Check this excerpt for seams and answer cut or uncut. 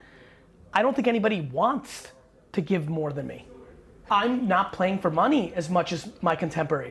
cut